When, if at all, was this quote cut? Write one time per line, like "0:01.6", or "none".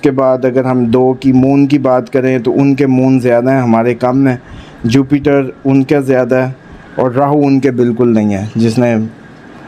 none